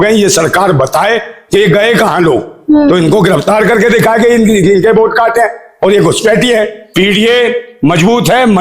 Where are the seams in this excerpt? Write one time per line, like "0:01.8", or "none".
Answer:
0:06.8

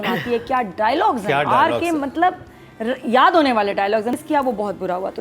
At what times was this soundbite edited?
0:04.1

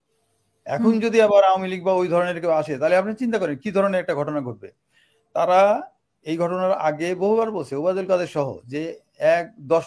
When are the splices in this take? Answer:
none

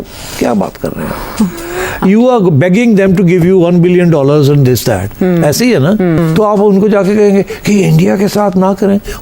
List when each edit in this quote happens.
0:06.2

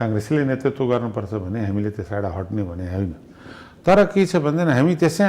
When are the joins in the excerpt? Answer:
none

